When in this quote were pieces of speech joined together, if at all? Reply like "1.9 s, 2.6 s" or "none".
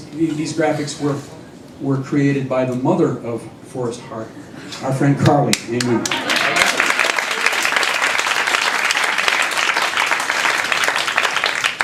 none